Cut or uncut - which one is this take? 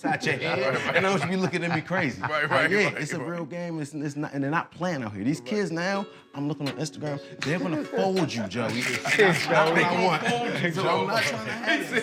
uncut